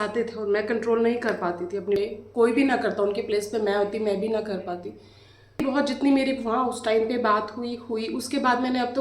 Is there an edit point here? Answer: yes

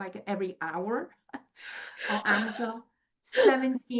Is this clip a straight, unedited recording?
yes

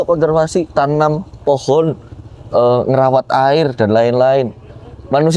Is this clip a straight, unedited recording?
yes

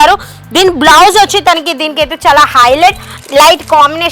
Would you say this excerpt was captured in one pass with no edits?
no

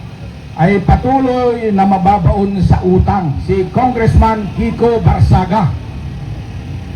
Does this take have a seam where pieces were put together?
yes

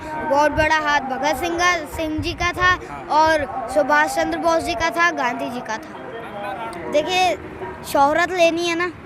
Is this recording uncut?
no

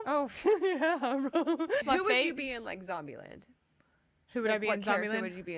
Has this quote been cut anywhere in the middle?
yes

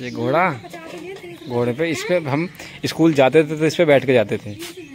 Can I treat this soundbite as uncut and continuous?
yes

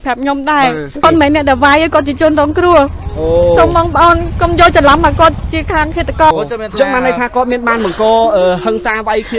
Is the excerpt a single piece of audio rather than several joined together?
no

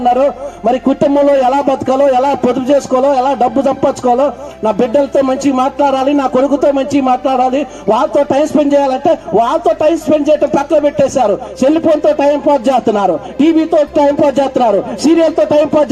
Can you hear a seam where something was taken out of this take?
no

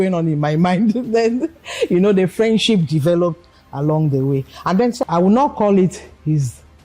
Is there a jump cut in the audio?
yes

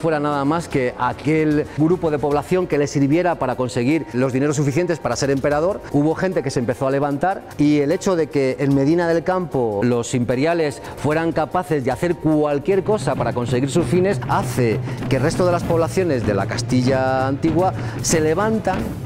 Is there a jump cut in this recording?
no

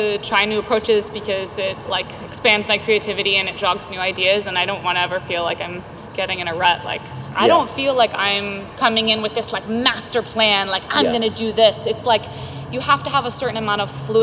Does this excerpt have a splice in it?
yes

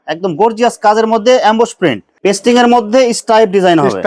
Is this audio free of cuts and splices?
no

